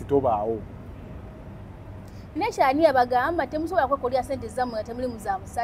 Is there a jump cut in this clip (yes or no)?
no